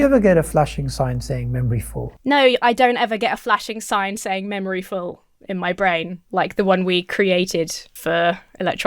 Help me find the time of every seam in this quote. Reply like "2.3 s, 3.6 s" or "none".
2.1 s